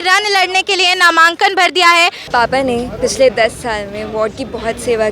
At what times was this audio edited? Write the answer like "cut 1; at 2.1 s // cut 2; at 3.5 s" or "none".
cut 1; at 2.2 s